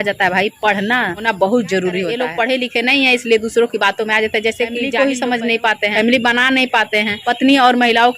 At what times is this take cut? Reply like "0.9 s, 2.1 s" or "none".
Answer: 2.3 s, 4.9 s